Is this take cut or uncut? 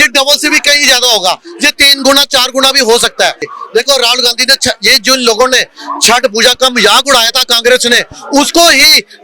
cut